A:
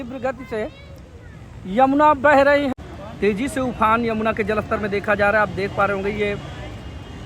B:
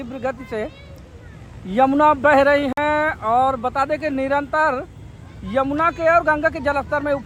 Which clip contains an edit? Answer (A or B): A